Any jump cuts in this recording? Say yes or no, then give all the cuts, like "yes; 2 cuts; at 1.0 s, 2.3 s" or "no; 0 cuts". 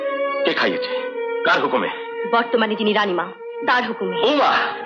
no; 0 cuts